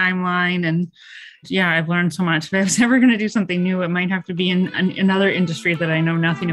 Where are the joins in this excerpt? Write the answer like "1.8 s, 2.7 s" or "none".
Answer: 1.4 s